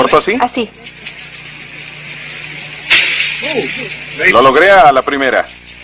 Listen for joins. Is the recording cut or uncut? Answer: uncut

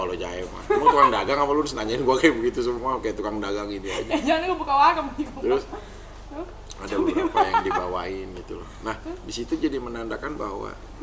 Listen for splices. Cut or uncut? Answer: uncut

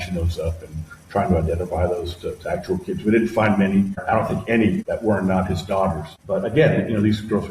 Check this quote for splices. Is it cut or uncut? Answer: cut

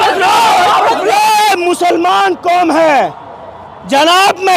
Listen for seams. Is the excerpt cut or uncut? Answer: cut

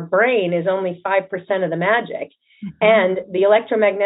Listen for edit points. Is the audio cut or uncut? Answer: uncut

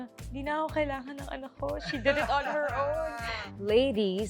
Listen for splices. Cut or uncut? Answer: cut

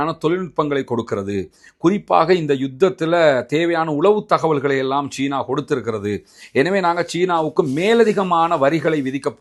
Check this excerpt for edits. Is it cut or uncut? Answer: uncut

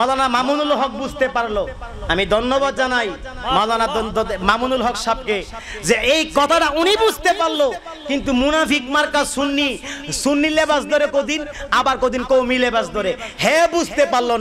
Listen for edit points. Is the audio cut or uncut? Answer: uncut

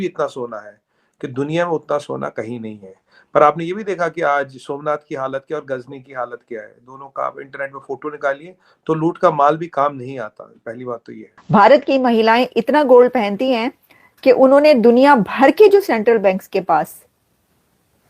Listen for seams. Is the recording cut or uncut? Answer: cut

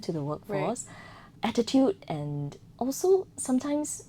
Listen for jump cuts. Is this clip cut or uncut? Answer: uncut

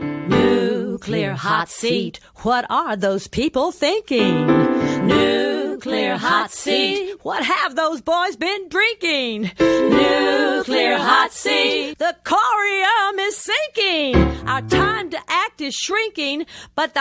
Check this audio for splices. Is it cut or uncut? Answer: uncut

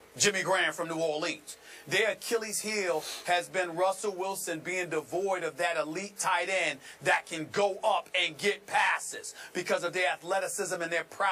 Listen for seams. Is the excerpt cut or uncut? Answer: cut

